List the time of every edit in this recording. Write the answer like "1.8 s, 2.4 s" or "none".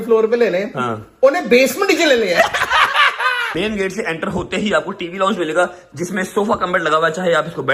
3.4 s